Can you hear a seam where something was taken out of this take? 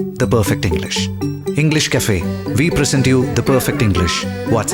no; 0 cuts

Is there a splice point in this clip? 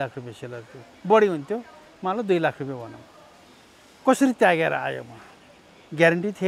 no; 0 cuts

